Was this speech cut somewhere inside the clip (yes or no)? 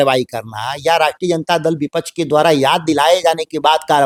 no